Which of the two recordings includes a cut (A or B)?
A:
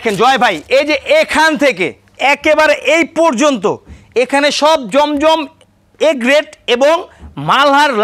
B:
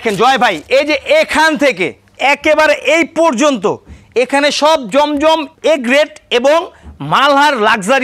B